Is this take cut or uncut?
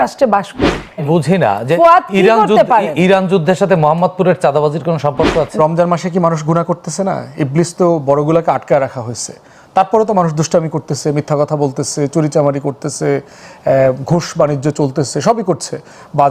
cut